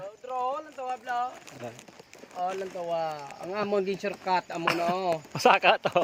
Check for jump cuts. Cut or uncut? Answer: uncut